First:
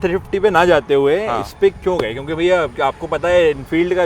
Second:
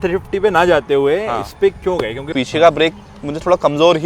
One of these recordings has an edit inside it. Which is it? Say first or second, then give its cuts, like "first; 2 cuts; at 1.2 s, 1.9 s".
second; 1 cut; at 2.3 s